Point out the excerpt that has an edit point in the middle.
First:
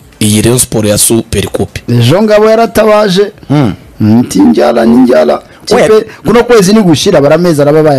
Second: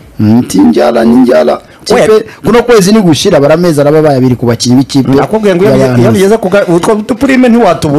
first; 1 cut; at 1.8 s

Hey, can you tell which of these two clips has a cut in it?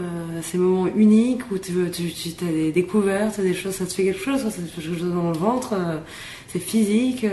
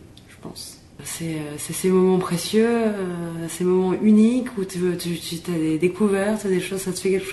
second; 1 cut; at 1.0 s

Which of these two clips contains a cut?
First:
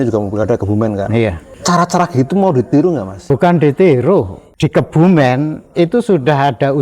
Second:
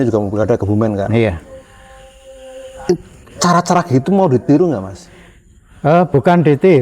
first; 3 cuts; at 1.5 s, 3.2 s, 4.4 s

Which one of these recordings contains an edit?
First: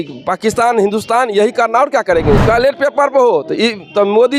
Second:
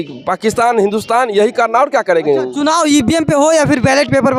first; 1 cut; at 2.4 s

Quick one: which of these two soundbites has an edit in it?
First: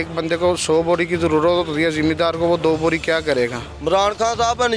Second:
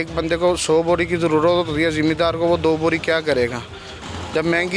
first; 1 cut; at 3.7 s

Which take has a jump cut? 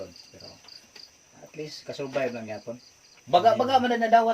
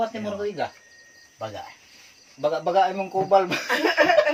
first; 1 cut; at 3.1 s

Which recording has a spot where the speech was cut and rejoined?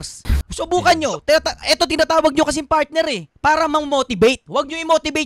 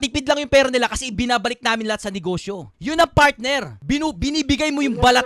second; 1 cut; at 3.7 s

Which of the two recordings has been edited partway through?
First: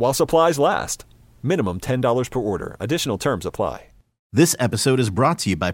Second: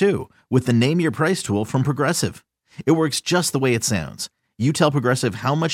first; 1 cut; at 4.3 s

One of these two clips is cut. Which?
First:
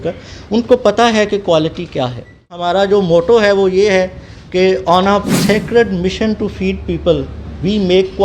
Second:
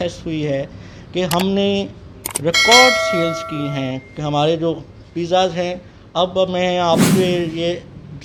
first; 1 cut; at 2.7 s

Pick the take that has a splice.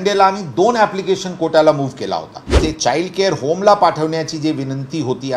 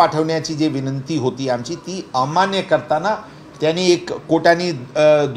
first; 1 cut; at 2.5 s

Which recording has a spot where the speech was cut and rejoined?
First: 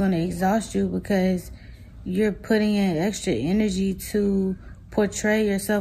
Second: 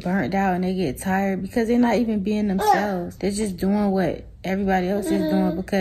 second; 1 cut; at 3.1 s

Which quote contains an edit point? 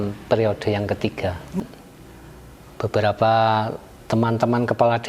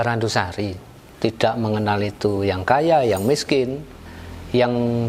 first; 1 cut; at 1.7 s

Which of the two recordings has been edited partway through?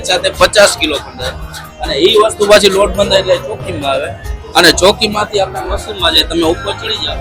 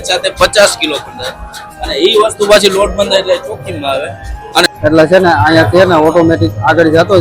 second; 1 cut; at 4.6 s

